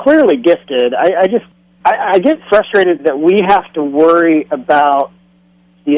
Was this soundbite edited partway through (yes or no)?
yes